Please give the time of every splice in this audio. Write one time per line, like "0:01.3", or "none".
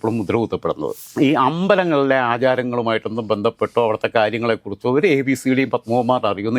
0:00.9